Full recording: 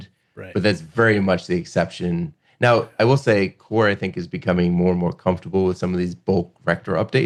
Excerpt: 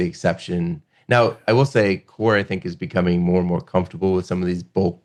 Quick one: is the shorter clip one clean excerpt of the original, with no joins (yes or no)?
yes